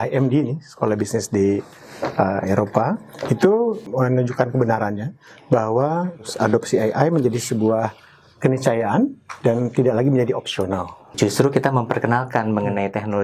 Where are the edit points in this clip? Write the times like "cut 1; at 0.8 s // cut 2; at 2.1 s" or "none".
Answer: cut 1; at 3.8 s // cut 2; at 6.3 s // cut 3; at 11.1 s